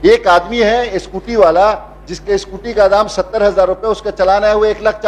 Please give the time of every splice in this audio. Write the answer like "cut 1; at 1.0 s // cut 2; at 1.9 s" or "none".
none